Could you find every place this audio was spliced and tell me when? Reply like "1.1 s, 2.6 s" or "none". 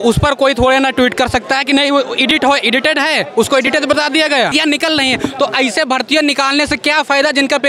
4.5 s